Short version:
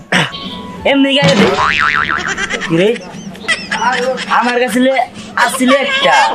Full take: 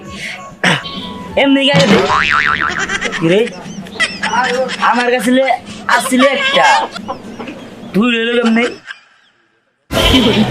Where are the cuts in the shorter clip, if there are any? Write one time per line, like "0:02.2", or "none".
none